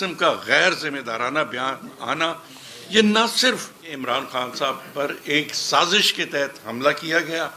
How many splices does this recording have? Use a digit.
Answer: 1